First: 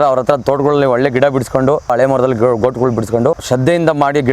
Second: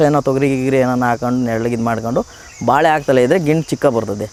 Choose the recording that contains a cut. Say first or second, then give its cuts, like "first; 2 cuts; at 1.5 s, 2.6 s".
first; 2 cuts; at 1.9 s, 3.4 s